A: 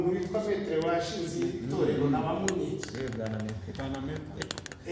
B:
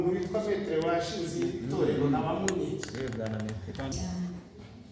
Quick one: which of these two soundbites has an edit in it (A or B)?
B